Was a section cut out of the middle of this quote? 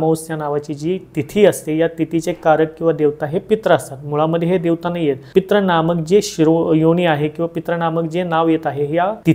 no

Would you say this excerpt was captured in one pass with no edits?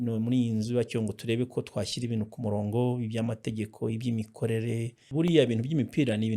no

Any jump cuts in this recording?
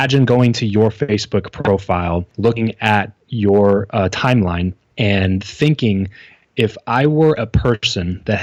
no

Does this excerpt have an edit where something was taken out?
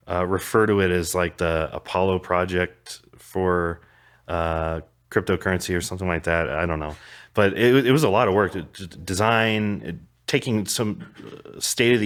no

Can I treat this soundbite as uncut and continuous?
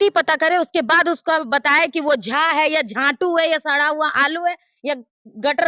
yes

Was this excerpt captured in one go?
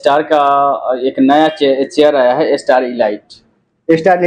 yes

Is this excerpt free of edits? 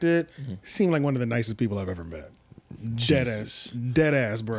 yes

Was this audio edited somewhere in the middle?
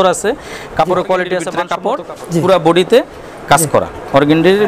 yes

